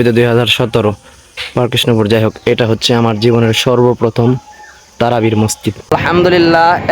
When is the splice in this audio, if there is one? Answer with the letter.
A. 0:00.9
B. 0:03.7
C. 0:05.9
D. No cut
C